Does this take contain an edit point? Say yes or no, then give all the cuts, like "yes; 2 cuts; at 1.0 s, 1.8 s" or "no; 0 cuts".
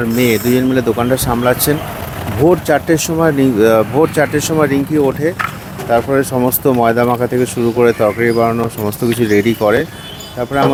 no; 0 cuts